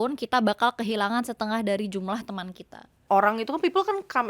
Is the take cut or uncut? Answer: cut